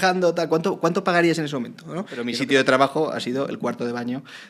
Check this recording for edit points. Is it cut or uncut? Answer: cut